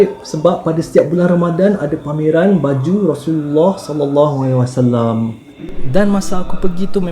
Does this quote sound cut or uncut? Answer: uncut